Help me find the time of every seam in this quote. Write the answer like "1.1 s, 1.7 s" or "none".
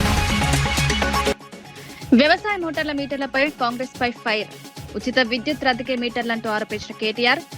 1.3 s